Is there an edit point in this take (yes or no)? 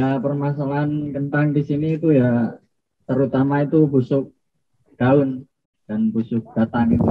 no